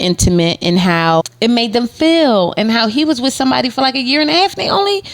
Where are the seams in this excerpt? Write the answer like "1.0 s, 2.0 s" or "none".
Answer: 1.3 s